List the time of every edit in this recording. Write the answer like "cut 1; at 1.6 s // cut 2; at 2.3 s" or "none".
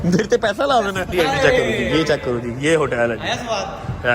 cut 1; at 1.1 s